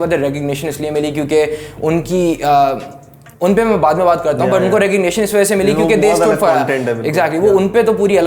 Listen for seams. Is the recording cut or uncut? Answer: uncut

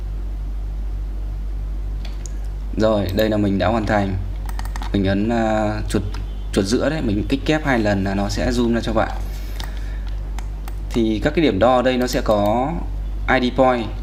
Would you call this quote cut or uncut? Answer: uncut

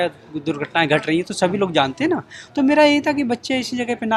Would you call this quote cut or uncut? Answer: uncut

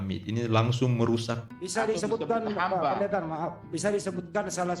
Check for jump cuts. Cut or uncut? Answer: cut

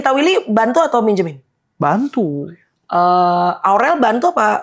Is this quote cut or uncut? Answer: uncut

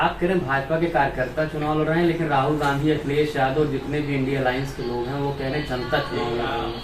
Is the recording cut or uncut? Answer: uncut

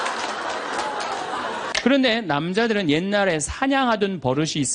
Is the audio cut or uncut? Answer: cut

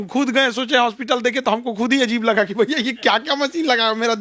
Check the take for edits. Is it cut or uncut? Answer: uncut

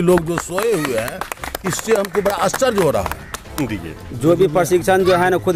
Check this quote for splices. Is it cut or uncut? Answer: cut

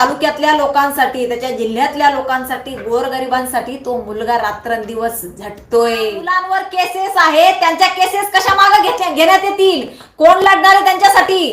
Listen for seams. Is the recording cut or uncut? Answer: cut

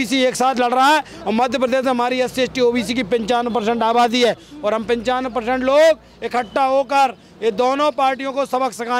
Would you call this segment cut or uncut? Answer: uncut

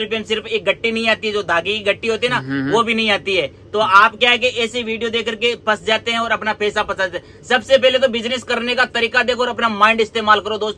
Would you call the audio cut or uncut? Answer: uncut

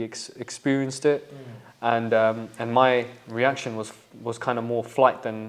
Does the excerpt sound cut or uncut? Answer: uncut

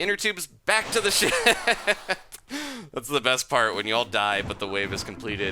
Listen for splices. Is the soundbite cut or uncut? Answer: uncut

